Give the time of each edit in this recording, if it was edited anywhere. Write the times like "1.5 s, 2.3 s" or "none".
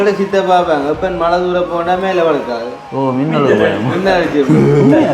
none